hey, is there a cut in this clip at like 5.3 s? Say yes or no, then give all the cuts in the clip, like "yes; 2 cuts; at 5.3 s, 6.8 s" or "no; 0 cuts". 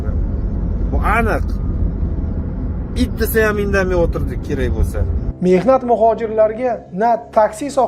yes; 1 cut; at 5.3 s